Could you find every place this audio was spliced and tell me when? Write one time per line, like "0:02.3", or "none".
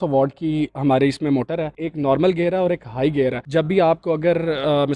0:01.7